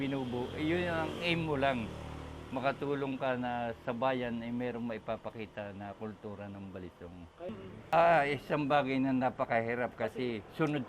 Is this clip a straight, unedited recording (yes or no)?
no